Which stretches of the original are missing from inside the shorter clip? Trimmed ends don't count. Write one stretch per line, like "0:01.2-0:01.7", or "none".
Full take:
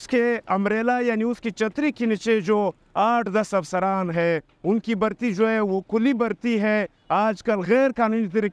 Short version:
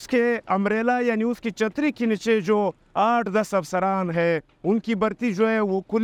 none

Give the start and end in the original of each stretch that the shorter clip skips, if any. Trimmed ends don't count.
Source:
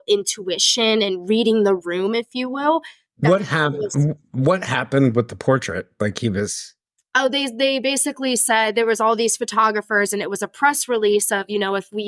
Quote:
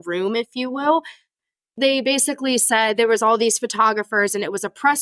0:03.3-0:07.3

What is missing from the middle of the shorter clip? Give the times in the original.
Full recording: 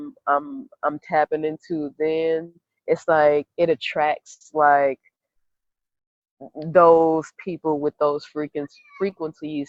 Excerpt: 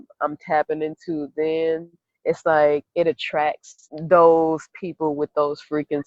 0:04.4-0:06.4

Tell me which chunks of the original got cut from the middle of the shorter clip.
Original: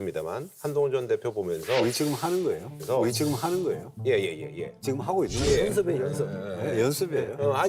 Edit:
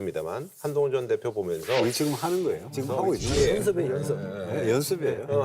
0:02.7-0:04.8

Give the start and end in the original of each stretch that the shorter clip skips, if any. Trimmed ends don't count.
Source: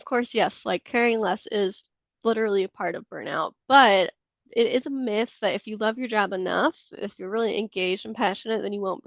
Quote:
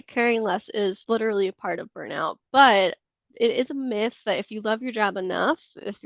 0:01.8-0:02.2

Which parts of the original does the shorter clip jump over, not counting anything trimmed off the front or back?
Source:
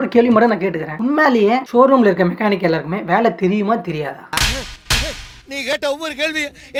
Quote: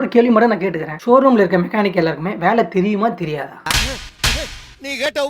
0:01.0-0:01.6

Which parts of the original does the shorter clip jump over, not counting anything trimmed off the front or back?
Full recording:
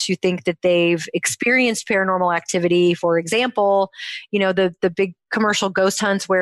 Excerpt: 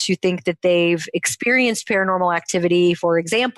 none

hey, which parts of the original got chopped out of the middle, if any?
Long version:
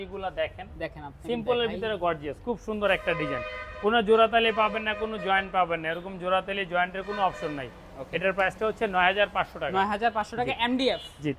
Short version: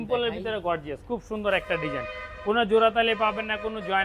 none

